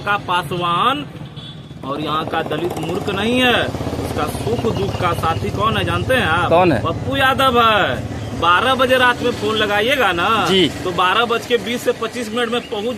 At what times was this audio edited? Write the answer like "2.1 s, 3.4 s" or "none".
none